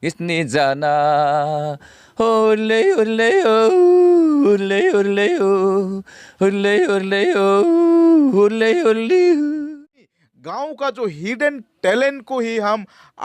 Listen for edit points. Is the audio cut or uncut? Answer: cut